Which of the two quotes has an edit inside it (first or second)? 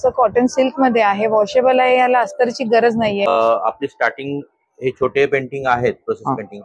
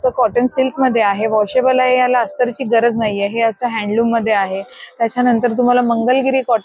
first